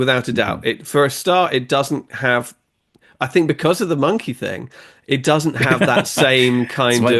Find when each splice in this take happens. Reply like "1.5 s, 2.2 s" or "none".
none